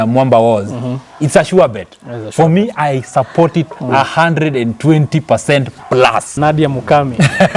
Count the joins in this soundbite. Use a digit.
1